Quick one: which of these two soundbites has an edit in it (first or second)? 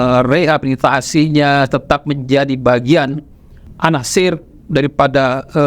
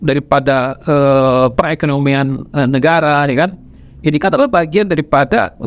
first